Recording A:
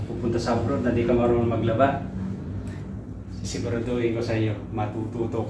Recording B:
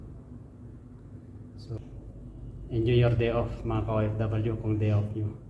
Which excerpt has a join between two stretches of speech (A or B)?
B